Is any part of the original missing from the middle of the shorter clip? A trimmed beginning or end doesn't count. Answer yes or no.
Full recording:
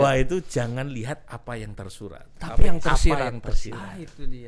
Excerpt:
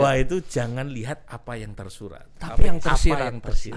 no